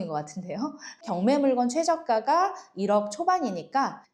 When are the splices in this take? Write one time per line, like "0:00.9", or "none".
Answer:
0:01.0